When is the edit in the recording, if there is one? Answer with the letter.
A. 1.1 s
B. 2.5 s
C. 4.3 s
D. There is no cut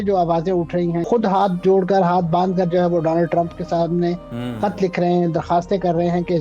A